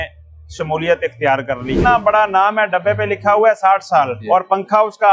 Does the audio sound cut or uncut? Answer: cut